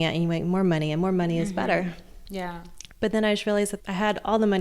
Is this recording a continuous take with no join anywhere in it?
no; 2 cuts; at 3.0 s, 3.8 s

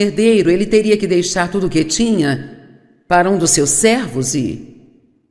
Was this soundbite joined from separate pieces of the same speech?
no; 0 cuts

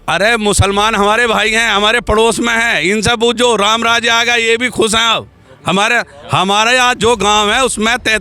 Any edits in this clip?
no; 0 cuts

